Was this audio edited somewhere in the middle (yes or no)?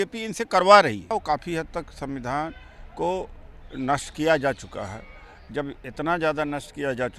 yes